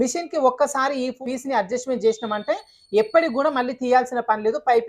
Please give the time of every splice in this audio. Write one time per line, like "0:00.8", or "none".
0:01.2